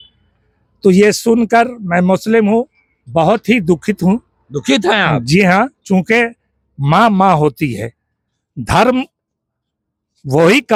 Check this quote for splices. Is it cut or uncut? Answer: uncut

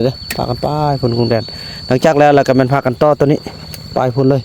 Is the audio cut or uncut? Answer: uncut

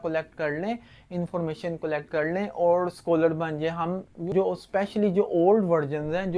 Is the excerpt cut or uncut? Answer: cut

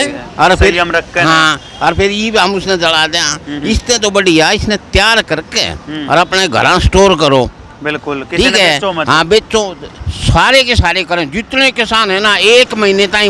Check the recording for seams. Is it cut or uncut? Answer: uncut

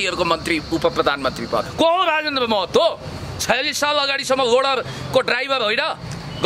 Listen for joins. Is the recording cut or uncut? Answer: cut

